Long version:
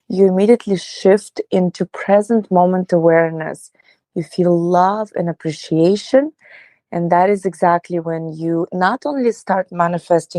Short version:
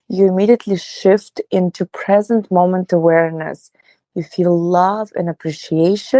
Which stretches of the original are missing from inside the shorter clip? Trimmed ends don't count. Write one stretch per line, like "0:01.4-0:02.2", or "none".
none